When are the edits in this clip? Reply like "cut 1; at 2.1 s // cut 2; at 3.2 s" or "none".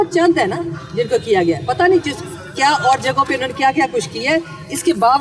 none